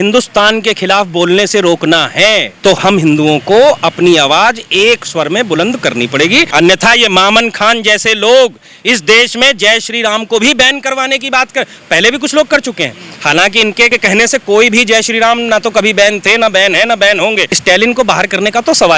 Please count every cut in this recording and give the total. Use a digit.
3